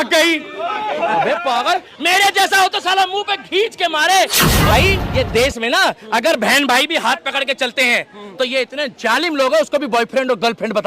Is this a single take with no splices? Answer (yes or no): no